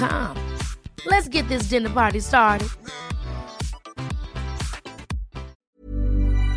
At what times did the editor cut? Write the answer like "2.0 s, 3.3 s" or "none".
5.6 s